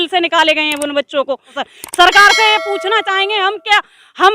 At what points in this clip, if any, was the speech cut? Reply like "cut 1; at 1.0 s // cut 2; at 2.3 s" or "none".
cut 1; at 1.6 s